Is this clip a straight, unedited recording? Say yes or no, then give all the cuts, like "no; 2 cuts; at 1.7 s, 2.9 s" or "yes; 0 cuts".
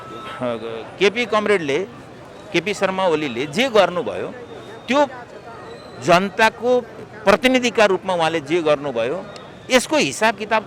yes; 0 cuts